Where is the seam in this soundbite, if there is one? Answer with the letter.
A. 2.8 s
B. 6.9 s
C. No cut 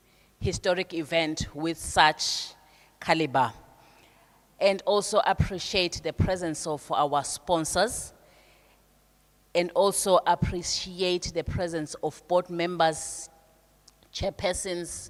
C